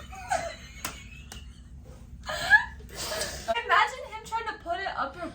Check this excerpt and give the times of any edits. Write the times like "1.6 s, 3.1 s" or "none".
3.5 s